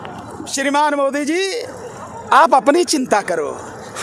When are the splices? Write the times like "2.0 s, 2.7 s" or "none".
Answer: none

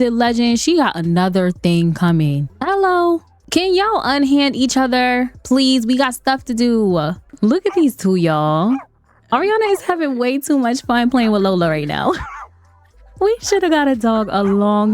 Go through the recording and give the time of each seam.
2.5 s, 3.4 s, 7.2 s

